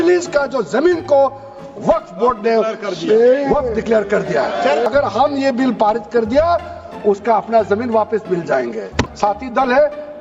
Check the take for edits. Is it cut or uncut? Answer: cut